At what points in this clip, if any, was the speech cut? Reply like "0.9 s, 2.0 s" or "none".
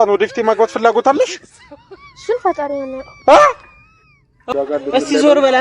4.5 s